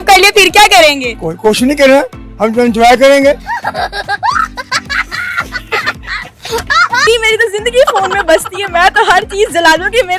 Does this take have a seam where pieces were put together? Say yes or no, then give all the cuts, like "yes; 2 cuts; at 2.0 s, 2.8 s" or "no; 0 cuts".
yes; 1 cut; at 7.1 s